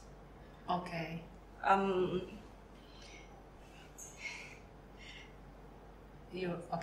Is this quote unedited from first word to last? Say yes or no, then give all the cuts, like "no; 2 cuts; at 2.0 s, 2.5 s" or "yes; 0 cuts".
yes; 0 cuts